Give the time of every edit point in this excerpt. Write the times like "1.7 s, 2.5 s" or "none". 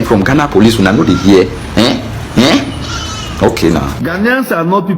4.0 s